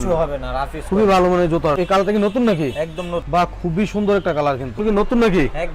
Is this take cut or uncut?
cut